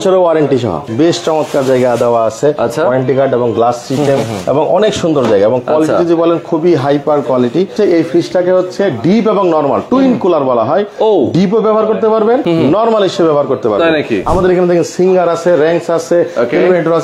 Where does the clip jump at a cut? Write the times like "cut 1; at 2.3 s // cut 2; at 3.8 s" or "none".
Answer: cut 1; at 0.9 s // cut 2; at 7.7 s // cut 3; at 9.8 s // cut 4; at 12.4 s // cut 5; at 14.2 s

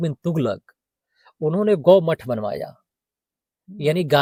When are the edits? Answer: none

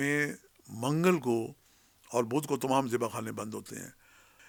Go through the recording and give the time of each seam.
none

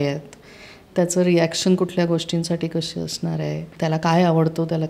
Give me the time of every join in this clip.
cut 1; at 3.7 s

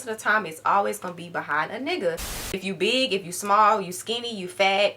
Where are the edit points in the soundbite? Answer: cut 1; at 2.1 s

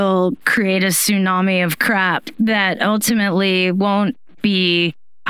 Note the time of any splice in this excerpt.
none

